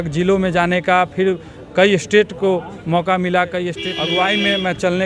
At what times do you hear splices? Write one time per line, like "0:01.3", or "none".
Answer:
0:03.9